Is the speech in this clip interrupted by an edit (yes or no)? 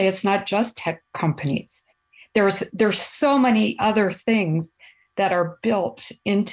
no